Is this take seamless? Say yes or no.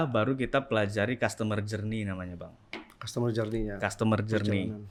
yes